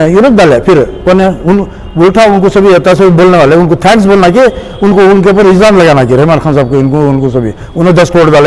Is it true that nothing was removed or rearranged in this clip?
yes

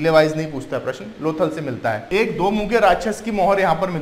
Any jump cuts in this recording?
yes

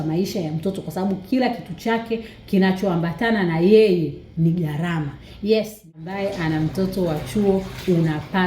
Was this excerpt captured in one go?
no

